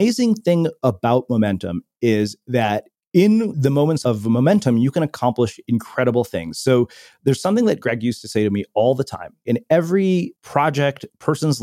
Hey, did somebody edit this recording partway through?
yes; 3 cuts; at 4.0 s, 9.4 s, 10.4 s

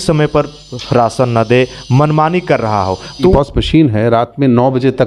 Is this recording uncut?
no; 1 cut; at 3.3 s

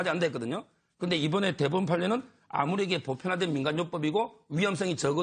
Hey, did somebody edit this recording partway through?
yes; 1 cut; at 1.9 s

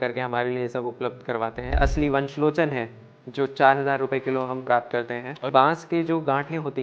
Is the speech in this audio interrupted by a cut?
yes; 2 cuts; at 1.8 s, 5.5 s

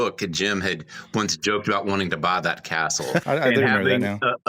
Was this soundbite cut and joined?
yes; 1 cut; at 3.2 s

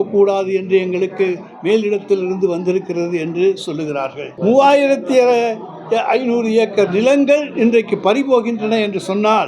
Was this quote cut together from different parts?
yes; 1 cut; at 4.3 s

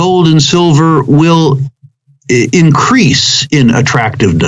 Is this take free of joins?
yes; 0 cuts

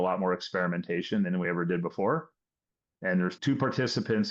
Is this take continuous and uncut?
no; 1 cut; at 3.4 s

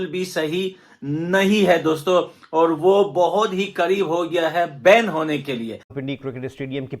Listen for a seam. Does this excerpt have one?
yes; 1 cut; at 5.9 s

